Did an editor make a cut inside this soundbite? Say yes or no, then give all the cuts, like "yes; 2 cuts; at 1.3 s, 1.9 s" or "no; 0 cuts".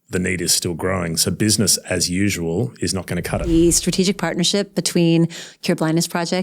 yes; 1 cut; at 3.5 s